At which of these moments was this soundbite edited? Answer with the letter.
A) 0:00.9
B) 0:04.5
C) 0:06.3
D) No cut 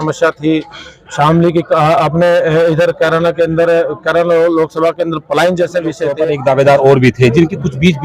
C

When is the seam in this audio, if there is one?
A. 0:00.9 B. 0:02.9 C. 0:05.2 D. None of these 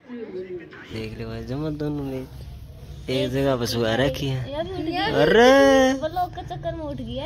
A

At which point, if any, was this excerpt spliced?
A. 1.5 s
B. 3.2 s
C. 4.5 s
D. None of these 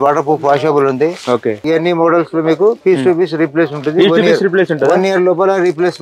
A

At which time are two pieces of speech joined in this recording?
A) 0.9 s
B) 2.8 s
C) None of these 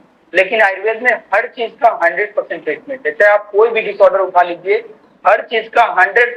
C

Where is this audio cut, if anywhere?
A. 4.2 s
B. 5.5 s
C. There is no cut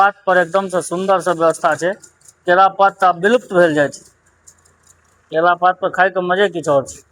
C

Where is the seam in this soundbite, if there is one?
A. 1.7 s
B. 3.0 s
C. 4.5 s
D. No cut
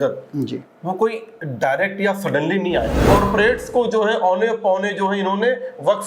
B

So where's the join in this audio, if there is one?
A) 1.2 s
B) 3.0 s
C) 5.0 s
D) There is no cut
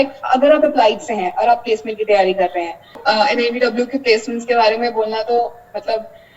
B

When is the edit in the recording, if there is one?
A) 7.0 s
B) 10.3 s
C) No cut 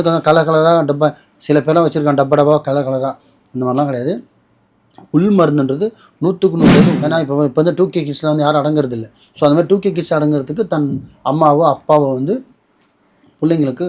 A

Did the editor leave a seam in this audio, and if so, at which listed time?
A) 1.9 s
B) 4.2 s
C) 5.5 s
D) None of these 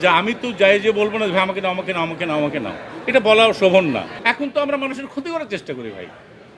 B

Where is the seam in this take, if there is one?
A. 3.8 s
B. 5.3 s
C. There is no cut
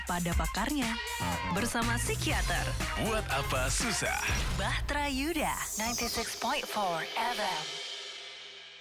C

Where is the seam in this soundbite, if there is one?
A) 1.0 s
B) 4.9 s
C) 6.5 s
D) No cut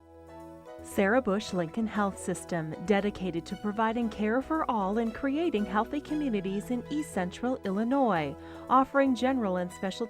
A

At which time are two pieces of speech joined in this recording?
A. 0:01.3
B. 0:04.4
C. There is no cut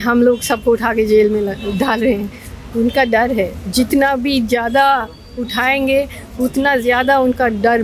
C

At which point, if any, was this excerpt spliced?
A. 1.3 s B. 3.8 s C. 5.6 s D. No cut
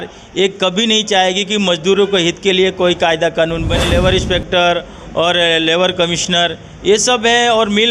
B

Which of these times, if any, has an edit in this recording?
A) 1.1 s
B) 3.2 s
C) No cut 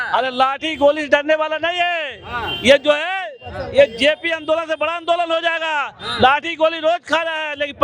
C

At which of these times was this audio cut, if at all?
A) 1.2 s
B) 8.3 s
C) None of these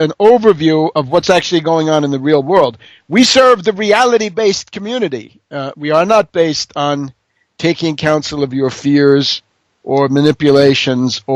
A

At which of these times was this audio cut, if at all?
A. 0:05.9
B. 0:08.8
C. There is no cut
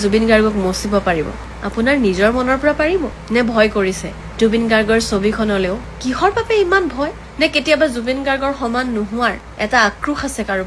A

